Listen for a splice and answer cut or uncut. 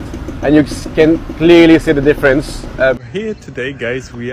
cut